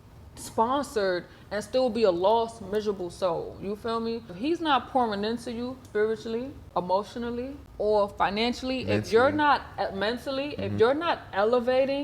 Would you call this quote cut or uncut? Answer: cut